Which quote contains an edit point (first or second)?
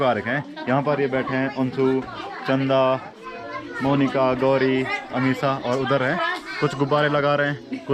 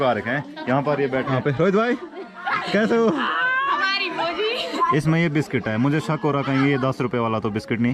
second